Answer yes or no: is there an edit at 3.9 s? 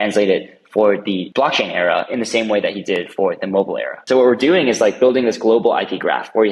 yes